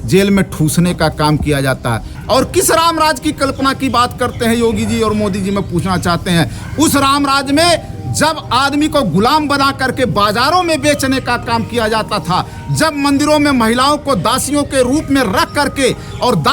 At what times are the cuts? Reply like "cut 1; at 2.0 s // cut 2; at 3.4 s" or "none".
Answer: none